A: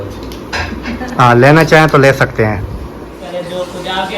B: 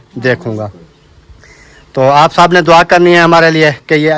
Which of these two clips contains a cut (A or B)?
A